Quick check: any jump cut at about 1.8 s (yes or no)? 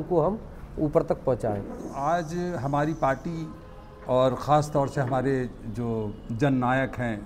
yes